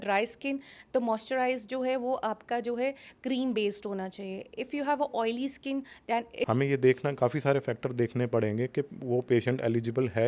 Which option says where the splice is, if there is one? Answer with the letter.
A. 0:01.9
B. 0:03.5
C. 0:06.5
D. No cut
C